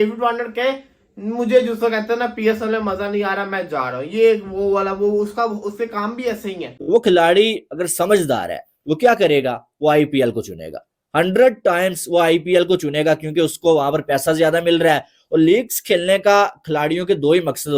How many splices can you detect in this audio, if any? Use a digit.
1